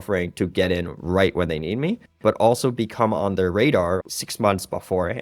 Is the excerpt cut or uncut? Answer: cut